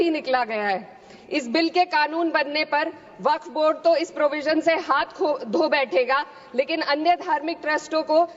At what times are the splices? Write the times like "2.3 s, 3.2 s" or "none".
none